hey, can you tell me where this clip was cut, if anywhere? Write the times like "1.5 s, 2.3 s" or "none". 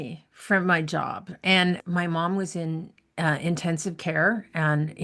1.8 s